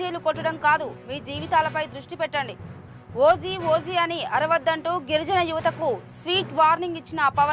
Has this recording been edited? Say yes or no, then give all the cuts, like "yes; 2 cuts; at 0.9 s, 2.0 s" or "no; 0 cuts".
no; 0 cuts